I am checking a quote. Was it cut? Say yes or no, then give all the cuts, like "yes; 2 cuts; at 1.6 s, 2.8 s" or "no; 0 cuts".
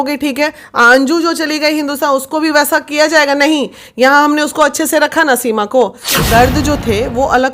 yes; 1 cut; at 6.1 s